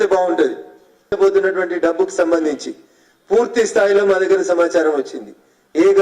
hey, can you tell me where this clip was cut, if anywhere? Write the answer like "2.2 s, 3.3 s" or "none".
1.1 s